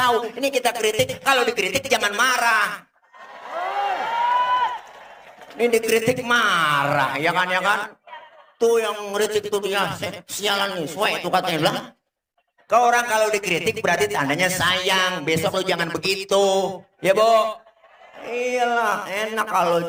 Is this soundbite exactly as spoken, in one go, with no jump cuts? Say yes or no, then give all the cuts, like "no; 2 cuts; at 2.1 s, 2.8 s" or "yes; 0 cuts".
yes; 0 cuts